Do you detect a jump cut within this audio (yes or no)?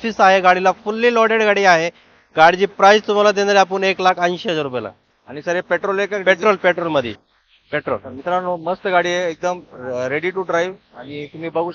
no